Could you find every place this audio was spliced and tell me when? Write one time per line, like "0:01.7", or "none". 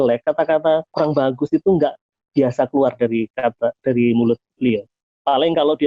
0:00.9